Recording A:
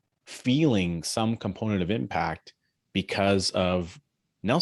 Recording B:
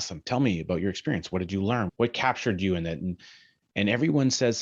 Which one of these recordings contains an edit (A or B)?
B